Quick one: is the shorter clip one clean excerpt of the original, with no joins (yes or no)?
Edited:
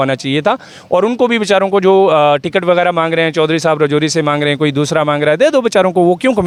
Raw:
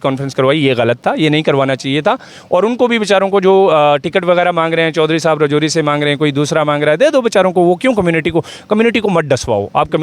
yes